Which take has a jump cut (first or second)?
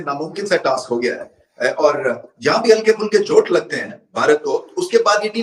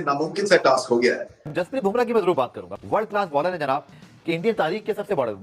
second